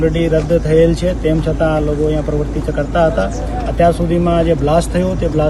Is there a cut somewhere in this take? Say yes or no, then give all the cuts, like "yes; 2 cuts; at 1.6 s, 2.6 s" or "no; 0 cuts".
no; 0 cuts